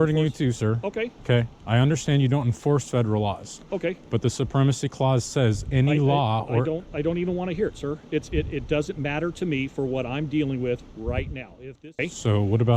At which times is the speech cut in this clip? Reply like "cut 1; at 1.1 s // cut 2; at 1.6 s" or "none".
cut 1; at 11.6 s